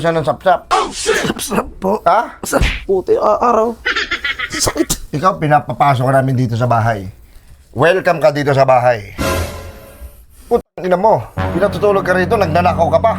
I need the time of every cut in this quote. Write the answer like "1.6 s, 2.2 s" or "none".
2.7 s